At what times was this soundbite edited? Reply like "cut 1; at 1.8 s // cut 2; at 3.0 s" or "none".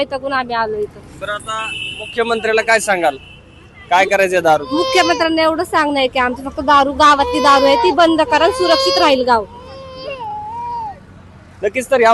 none